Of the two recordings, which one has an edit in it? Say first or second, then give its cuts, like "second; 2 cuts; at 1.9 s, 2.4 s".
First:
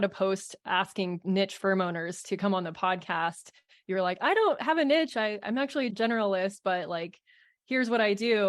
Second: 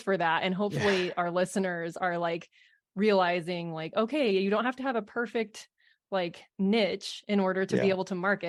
first; 1 cut; at 1.2 s